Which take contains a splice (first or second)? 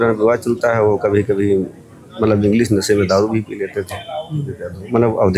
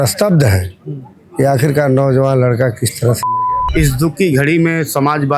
second